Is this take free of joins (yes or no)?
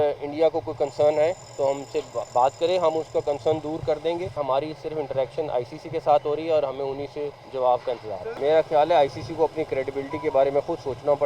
no